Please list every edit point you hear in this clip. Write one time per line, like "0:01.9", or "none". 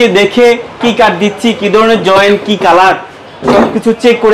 none